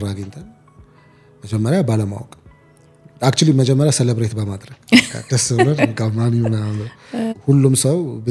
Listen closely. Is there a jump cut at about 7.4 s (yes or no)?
yes